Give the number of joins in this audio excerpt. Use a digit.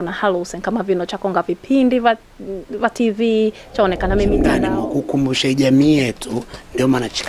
1